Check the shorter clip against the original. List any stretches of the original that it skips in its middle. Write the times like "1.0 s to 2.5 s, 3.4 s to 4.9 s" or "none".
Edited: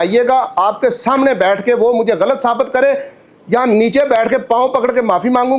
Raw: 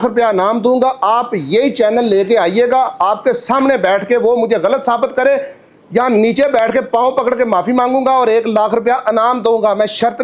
none